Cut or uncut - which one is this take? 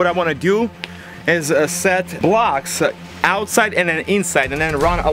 cut